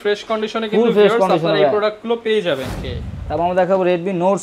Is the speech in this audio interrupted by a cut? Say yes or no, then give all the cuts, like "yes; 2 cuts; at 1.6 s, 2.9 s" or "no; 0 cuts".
yes; 1 cut; at 2.7 s